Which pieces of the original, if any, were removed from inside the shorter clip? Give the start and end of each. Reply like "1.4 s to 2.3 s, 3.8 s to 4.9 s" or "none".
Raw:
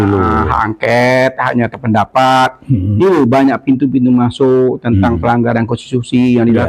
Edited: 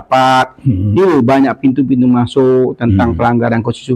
none